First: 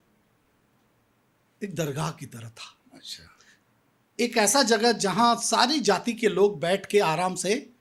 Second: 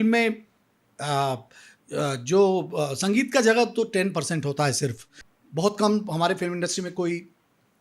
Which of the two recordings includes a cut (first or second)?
second